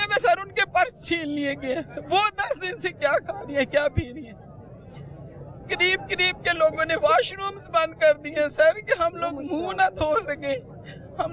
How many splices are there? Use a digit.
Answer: 0